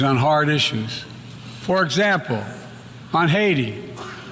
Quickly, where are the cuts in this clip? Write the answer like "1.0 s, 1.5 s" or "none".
none